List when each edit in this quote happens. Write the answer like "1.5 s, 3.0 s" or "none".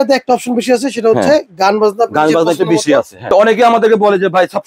3.2 s